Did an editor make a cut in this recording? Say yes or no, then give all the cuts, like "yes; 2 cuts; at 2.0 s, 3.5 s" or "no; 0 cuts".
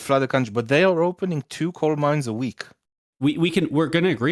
yes; 1 cut; at 3.0 s